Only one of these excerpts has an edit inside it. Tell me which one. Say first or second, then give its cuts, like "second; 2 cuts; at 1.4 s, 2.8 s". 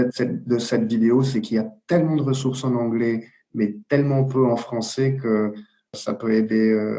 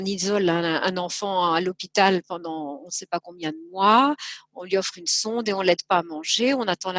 first; 1 cut; at 5.9 s